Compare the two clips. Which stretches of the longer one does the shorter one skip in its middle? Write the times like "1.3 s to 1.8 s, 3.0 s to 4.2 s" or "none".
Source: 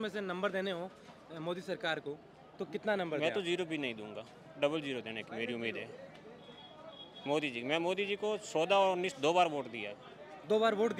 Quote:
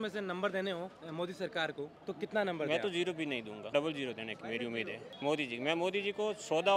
1.0 s to 1.3 s, 2.2 s to 2.5 s, 4.1 s to 4.4 s, 5.9 s to 7.1 s